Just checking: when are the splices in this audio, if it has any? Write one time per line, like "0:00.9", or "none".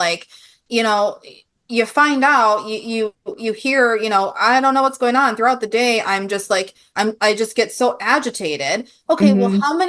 none